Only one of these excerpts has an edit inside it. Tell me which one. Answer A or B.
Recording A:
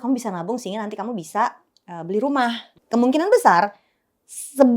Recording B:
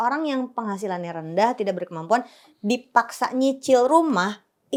A